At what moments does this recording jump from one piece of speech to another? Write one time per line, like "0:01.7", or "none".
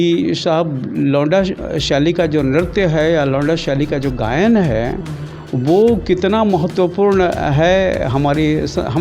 none